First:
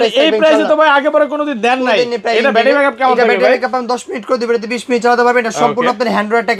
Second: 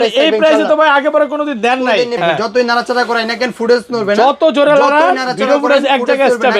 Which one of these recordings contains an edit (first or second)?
second